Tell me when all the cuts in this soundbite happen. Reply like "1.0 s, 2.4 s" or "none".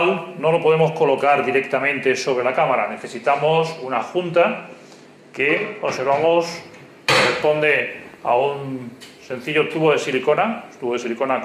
7.0 s

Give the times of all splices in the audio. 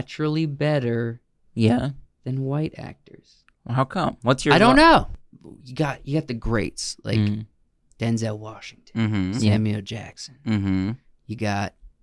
5.1 s

